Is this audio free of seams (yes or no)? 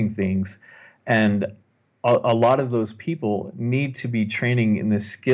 yes